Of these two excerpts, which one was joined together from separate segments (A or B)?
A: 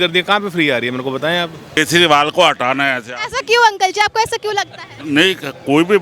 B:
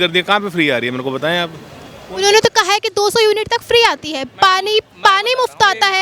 A